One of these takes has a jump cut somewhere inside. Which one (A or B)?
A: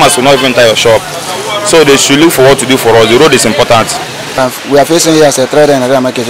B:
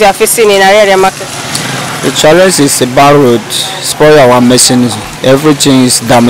A